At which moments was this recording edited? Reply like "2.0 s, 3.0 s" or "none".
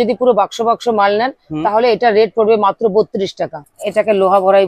3.6 s